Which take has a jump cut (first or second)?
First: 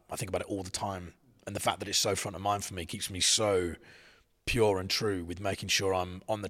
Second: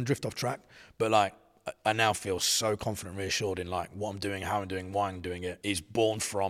second